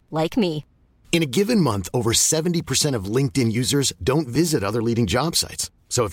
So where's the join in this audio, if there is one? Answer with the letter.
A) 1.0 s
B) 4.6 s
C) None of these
C